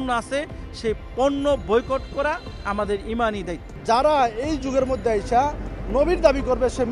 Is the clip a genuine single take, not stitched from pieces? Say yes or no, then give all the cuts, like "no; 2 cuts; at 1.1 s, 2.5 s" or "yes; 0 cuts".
no; 1 cut; at 3.7 s